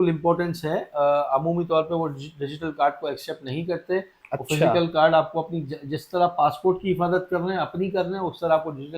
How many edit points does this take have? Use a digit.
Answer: 0